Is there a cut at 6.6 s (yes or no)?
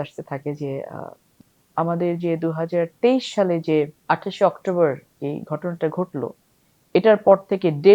no